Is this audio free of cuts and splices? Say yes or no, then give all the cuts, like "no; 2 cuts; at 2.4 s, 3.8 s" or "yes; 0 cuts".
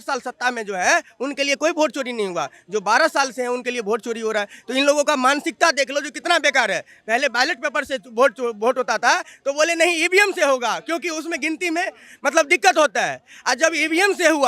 yes; 0 cuts